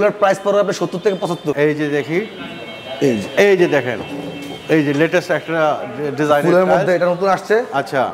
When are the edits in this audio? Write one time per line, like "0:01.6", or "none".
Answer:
0:01.6